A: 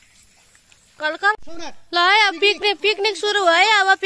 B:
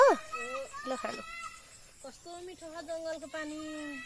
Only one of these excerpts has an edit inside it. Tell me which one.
A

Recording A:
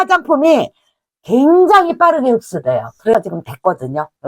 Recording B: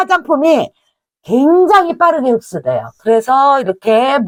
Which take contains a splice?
A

